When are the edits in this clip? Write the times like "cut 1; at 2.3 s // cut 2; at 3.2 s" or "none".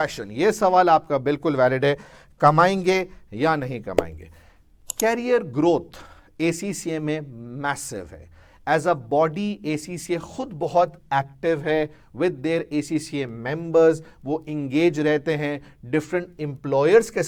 none